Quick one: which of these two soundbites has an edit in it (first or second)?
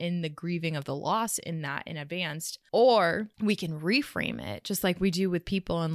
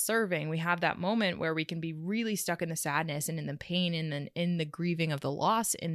first